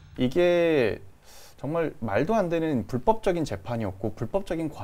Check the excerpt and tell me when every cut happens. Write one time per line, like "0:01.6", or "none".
none